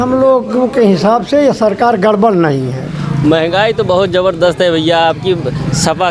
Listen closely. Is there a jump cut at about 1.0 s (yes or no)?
no